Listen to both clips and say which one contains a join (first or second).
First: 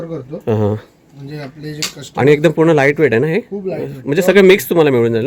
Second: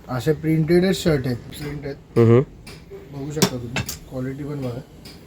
second